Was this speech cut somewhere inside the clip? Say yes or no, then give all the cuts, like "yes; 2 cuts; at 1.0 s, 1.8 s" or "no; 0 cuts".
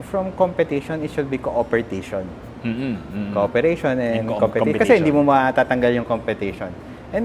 no; 0 cuts